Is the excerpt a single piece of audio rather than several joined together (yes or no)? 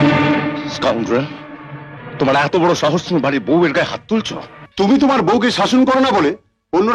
no